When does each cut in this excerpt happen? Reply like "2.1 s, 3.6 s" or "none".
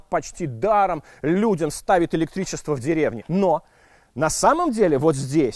3.2 s